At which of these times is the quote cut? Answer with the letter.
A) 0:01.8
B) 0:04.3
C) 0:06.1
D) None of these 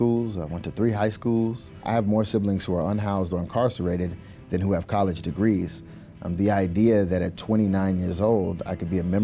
A